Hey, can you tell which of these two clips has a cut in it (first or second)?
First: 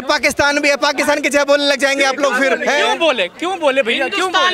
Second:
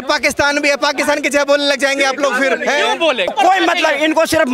second